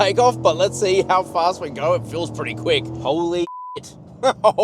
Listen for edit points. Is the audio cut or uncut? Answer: cut